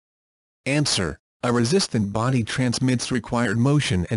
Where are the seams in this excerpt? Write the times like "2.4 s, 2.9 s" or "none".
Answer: none